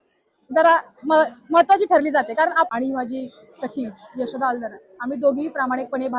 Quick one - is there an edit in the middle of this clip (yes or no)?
yes